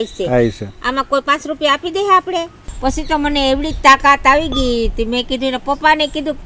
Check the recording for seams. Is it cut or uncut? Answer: cut